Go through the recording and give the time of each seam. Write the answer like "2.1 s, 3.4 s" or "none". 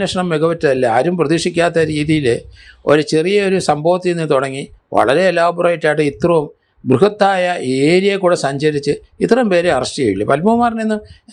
none